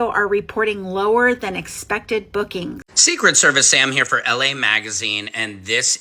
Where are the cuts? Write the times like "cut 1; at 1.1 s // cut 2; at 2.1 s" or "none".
cut 1; at 2.9 s